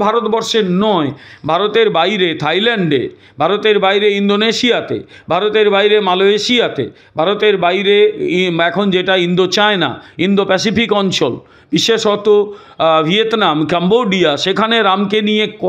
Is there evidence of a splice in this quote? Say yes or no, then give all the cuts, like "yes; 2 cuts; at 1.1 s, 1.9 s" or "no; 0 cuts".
no; 0 cuts